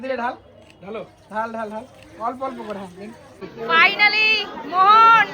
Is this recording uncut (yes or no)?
no